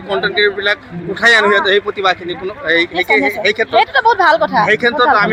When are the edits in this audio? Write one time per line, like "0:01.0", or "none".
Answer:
none